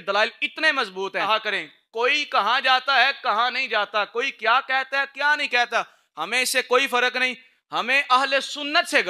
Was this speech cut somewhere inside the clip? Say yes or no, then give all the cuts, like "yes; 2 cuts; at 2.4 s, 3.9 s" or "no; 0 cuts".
yes; 1 cut; at 1.2 s